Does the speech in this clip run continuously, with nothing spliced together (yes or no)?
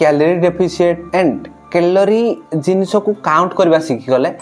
yes